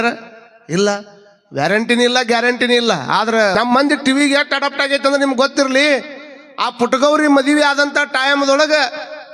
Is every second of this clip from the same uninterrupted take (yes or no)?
no